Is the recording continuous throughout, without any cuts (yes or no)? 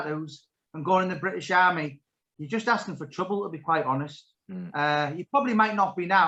yes